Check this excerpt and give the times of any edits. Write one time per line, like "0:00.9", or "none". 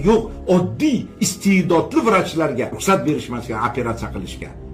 0:02.8